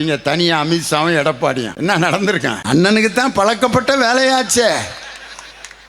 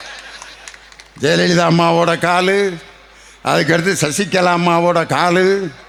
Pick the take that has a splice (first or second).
first